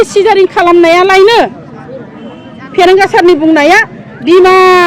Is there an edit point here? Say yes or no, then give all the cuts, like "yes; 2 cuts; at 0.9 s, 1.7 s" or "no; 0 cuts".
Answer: no; 0 cuts